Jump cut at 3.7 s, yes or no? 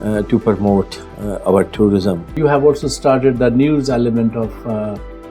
no